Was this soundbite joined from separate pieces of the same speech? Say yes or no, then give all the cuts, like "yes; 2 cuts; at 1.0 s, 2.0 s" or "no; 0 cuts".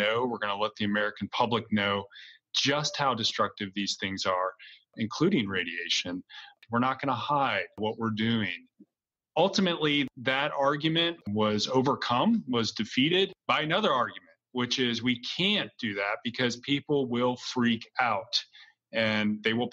yes; 2 cuts; at 6.6 s, 11.2 s